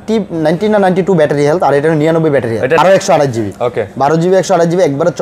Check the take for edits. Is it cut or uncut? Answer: cut